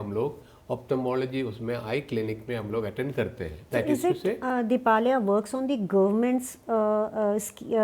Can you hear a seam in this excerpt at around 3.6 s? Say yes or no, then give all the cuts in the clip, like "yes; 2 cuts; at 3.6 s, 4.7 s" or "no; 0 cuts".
yes; 1 cut; at 3.6 s